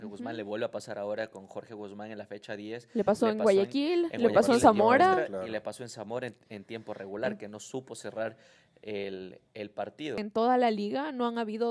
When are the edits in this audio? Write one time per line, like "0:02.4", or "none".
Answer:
0:10.2